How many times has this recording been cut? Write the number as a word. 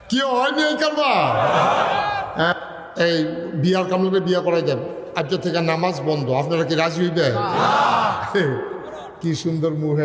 one